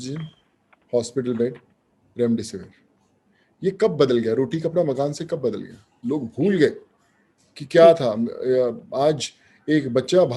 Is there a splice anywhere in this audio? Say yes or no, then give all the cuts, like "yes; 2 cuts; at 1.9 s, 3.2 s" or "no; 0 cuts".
no; 0 cuts